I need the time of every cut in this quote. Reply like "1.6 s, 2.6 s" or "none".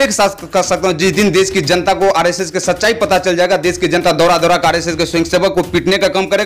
none